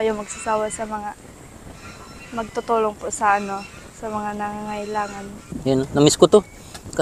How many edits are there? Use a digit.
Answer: 1